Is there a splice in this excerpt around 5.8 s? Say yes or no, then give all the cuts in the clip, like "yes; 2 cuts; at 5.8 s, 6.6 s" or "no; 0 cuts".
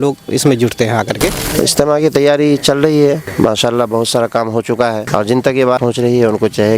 yes; 4 cuts; at 1.4 s, 3.3 s, 5.0 s, 5.8 s